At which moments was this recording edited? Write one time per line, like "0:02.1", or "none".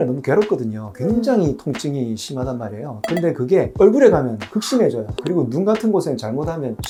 none